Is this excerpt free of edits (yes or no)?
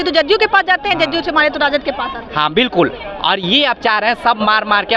yes